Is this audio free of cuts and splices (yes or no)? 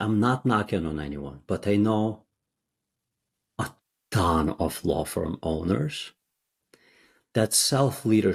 yes